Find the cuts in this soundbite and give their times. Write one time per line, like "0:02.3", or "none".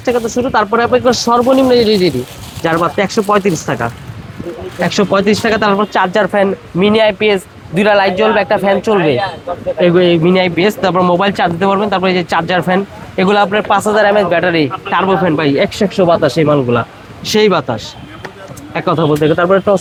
none

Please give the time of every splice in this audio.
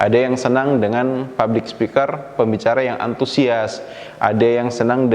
none

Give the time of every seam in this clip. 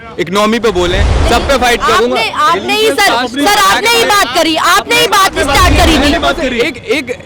none

